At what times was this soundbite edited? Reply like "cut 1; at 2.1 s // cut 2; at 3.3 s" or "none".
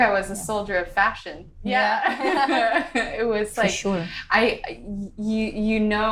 none